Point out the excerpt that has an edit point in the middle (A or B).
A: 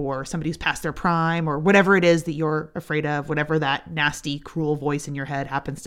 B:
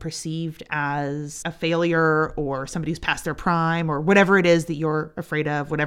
B